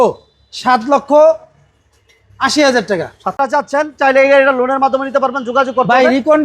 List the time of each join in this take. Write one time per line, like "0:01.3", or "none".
0:03.4